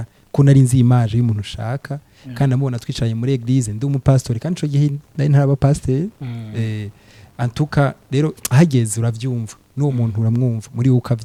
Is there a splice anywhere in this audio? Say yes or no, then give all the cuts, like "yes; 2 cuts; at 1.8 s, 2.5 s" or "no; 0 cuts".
no; 0 cuts